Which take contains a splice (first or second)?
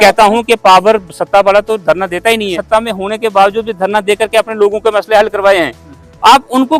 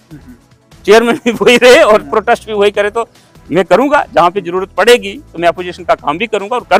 first